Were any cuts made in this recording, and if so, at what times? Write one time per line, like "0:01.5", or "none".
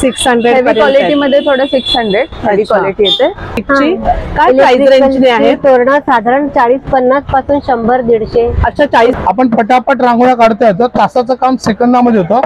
0:03.6
0:09.2